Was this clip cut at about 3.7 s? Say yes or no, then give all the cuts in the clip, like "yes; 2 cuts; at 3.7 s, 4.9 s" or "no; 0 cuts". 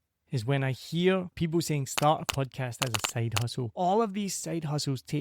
yes; 2 cuts; at 1.3 s, 3.7 s